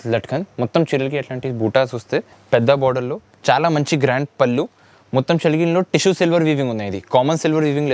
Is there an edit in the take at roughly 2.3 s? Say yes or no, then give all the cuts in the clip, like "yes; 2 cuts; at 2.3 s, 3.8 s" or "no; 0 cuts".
yes; 1 cut; at 2.3 s